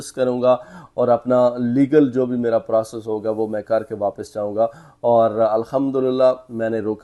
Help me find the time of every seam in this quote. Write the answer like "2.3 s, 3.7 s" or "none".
none